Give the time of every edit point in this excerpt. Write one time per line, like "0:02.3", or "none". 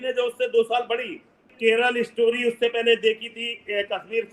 0:01.5